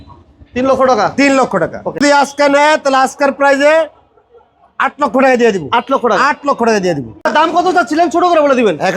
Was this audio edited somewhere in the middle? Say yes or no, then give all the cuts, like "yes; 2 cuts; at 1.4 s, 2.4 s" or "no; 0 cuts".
yes; 2 cuts; at 2.0 s, 7.2 s